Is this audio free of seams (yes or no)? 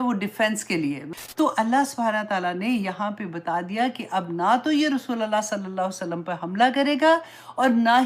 no